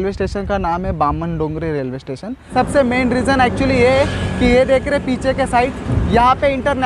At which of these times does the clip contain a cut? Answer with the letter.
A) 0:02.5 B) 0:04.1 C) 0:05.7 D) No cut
A